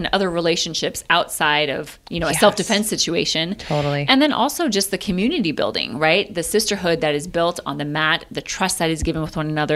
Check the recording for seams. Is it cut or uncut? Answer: uncut